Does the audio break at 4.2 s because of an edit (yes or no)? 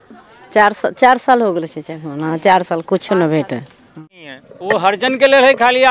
yes